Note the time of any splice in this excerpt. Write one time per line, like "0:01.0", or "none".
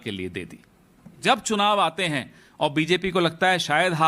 0:01.2